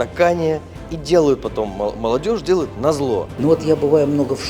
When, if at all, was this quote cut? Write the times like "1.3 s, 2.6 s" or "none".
3.3 s